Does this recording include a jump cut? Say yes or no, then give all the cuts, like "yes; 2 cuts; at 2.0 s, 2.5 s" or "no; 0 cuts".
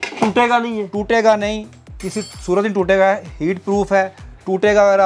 no; 0 cuts